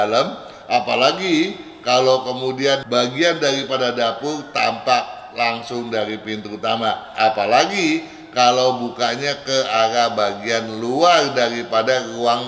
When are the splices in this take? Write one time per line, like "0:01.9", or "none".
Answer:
0:02.8
0:07.1